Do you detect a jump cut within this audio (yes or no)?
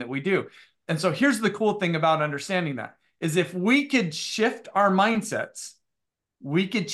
no